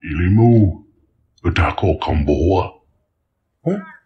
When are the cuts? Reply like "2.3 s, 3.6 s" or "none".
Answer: none